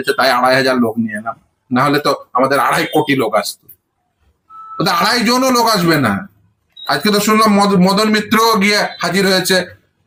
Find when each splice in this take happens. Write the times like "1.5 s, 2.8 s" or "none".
none